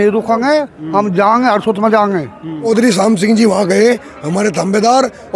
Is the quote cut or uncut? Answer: cut